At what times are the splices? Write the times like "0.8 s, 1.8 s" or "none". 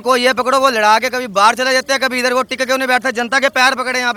none